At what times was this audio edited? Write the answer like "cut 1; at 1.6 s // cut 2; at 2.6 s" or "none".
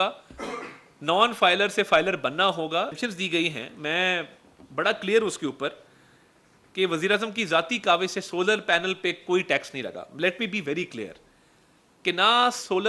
cut 1; at 3.0 s